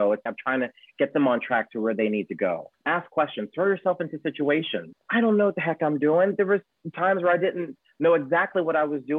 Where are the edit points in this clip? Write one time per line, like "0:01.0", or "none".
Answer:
0:02.7
0:05.0